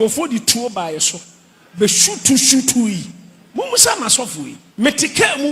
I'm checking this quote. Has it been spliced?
yes; 1 cut; at 4.6 s

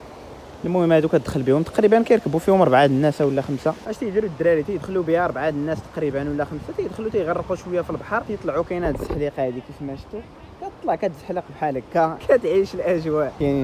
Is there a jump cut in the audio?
no; 0 cuts

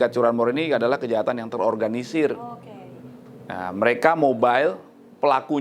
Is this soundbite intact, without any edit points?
yes; 0 cuts

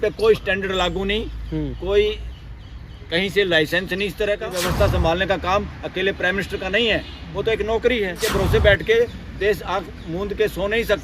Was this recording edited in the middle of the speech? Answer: yes; 2 cuts; at 4.6 s, 8.2 s

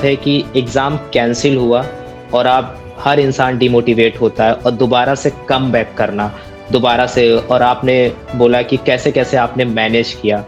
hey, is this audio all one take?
yes; 0 cuts

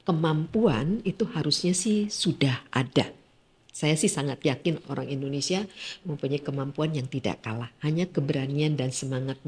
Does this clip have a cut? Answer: no; 0 cuts

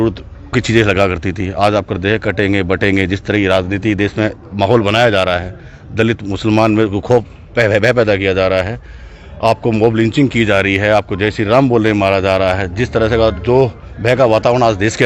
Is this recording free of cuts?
yes; 0 cuts

